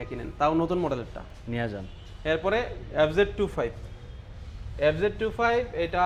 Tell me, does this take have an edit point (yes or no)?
no